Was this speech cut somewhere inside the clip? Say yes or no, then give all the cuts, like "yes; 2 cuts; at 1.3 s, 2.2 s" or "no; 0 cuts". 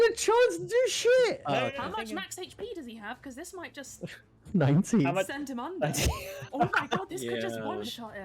yes; 1 cut; at 1.4 s